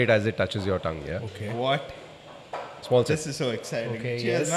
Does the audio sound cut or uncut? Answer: uncut